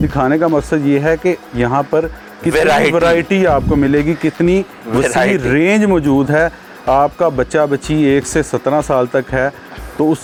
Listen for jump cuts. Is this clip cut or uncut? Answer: uncut